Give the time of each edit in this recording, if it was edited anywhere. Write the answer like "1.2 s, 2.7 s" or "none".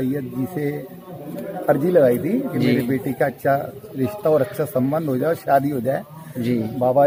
none